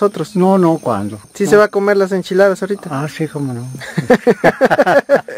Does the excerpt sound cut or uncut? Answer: uncut